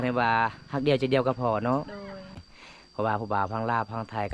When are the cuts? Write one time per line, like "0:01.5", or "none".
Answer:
0:02.5